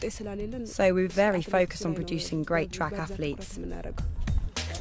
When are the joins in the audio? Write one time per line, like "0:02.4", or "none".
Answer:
none